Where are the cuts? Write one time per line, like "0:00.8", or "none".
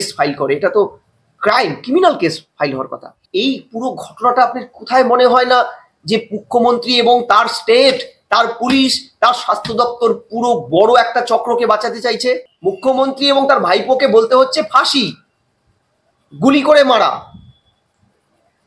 0:03.1
0:12.5